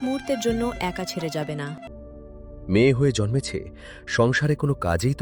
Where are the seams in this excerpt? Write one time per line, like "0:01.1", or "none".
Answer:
0:01.8